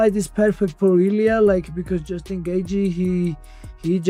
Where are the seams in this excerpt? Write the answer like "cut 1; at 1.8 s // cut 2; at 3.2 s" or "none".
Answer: none